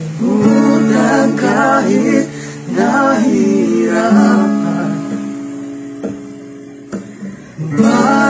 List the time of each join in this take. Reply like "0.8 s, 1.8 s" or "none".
none